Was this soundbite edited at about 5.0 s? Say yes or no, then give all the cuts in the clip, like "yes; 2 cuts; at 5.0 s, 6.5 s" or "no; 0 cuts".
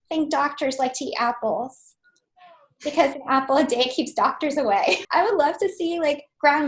yes; 1 cut; at 5.0 s